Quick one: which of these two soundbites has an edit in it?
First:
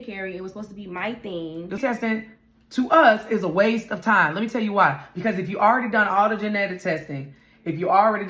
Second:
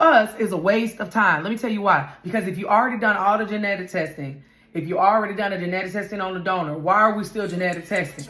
first; 1 cut; at 1.8 s

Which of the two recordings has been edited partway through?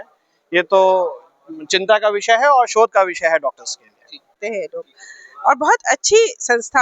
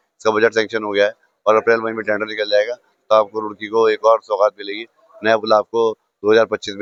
first; 1 cut; at 4.4 s

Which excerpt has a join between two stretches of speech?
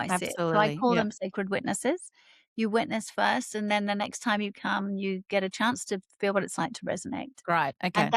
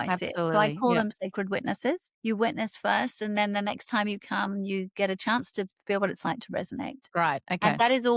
second; 1 cut; at 2.1 s

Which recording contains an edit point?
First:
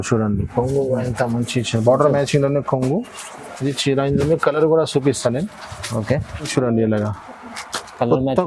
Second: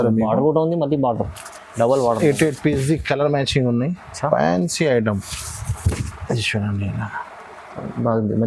first; 1 cut; at 6.5 s

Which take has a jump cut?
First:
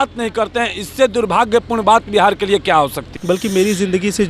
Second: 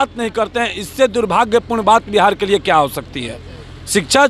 first; 1 cut; at 3.1 s

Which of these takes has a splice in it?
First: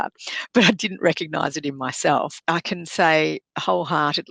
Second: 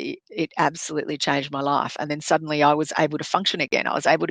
first; 1 cut; at 2.4 s

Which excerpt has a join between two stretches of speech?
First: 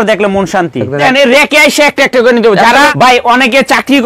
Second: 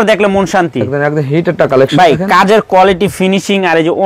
first; 2 cuts; at 1.0 s, 2.9 s

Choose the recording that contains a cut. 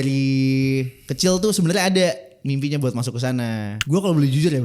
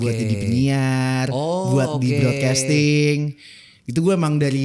first; 1 cut; at 3.8 s

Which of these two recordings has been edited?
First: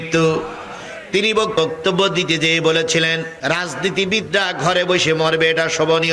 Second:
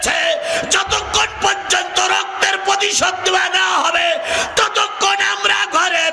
first; 2 cuts; at 1.5 s, 3.3 s

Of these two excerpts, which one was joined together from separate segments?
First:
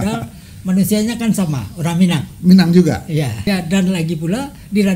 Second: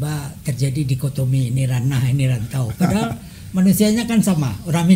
first; 1 cut; at 3.5 s

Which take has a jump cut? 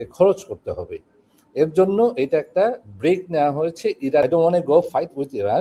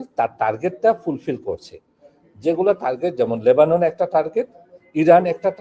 first; 1 cut; at 4.2 s

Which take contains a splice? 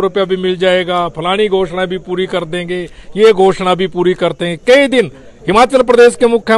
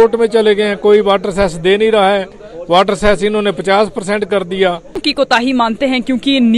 second; 1 cut; at 5.0 s

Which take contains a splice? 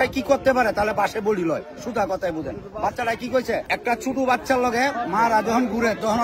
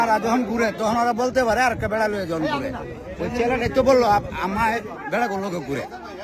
first; 1 cut; at 3.7 s

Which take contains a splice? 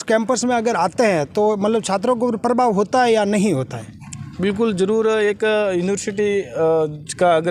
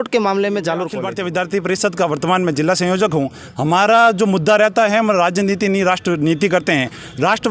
second; 1 cut; at 1.0 s

